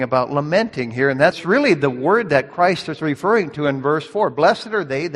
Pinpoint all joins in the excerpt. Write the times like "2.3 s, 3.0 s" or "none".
1.4 s